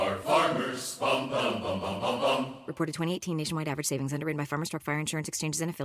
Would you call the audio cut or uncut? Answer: uncut